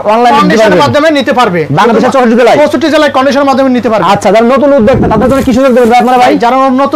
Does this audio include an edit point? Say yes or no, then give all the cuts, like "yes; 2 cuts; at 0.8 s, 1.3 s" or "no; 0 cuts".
no; 0 cuts